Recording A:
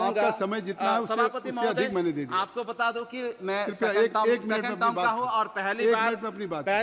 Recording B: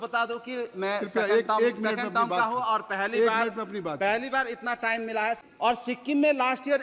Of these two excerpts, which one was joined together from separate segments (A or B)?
B